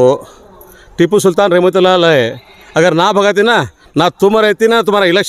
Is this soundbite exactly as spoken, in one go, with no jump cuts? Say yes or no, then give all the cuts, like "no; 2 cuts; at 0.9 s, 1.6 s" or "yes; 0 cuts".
yes; 0 cuts